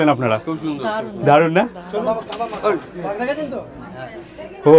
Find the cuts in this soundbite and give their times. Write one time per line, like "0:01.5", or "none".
none